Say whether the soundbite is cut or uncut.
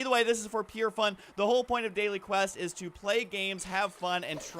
cut